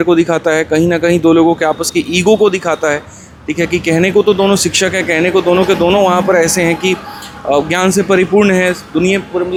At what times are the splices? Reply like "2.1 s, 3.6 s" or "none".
none